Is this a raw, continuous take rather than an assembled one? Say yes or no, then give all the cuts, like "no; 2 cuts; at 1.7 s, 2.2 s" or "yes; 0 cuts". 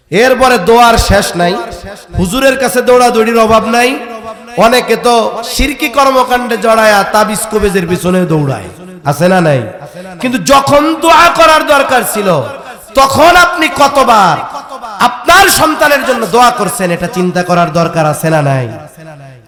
yes; 0 cuts